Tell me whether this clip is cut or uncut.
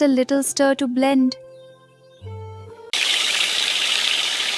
cut